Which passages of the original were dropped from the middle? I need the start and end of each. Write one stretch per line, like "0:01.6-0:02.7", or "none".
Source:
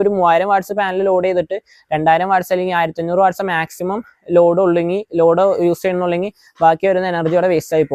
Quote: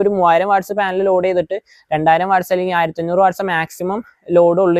none